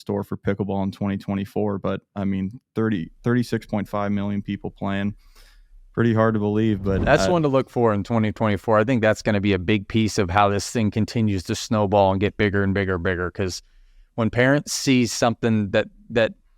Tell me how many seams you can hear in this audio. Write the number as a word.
one